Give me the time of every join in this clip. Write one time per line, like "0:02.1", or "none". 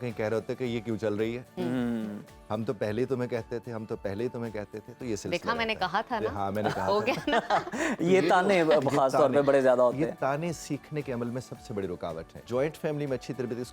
0:12.4

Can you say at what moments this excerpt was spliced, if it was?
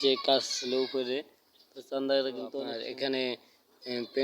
0:02.7

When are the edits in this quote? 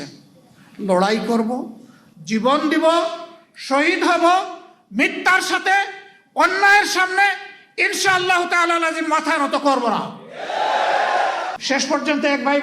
0:11.6

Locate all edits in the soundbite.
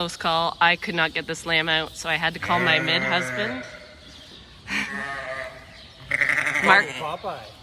none

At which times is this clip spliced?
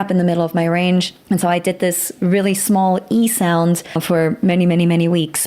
0:01.1
0:04.0

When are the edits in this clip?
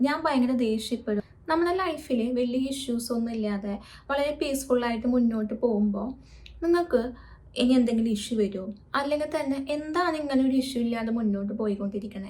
0:01.2

